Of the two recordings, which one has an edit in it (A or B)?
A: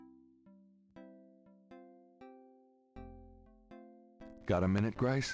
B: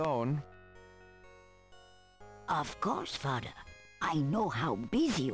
A